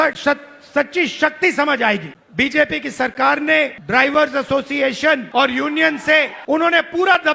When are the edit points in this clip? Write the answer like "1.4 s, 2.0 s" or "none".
2.2 s, 3.8 s, 5.3 s, 6.4 s